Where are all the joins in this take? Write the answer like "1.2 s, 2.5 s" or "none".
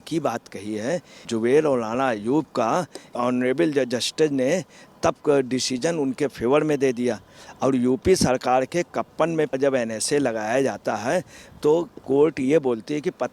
1.3 s, 3.2 s, 9.6 s